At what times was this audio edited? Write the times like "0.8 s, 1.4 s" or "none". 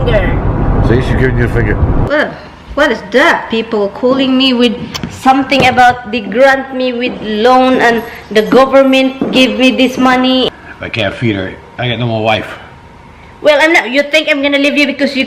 2.0 s, 10.5 s